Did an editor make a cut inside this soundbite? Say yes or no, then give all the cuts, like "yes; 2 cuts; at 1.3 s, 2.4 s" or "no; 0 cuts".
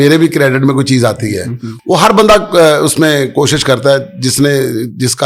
no; 0 cuts